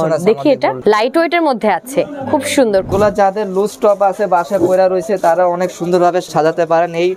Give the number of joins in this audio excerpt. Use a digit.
3